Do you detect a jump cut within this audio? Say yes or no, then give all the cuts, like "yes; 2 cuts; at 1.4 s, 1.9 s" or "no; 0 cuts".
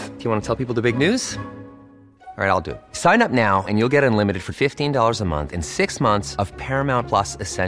no; 0 cuts